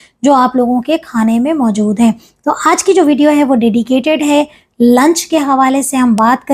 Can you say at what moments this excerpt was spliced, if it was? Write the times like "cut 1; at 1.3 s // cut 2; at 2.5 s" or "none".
none